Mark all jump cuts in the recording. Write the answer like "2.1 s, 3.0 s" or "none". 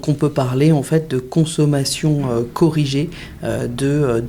none